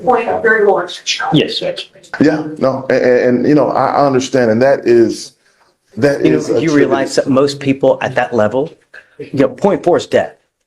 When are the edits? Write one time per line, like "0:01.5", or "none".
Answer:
0:02.1